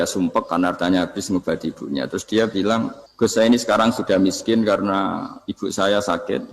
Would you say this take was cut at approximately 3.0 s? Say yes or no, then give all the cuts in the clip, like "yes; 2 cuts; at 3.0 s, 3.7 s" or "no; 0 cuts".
yes; 1 cut; at 3.0 s